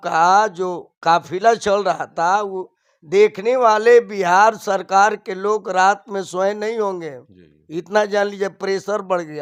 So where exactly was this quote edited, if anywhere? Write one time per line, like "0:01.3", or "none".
none